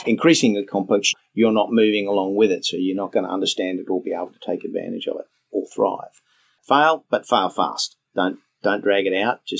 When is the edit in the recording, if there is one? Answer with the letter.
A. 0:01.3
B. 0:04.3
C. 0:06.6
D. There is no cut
C